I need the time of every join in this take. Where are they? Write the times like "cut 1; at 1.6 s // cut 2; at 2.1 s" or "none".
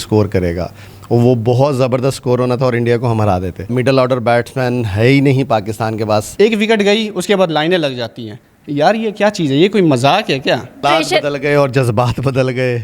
cut 1; at 3.6 s // cut 2; at 6.3 s // cut 3; at 10.8 s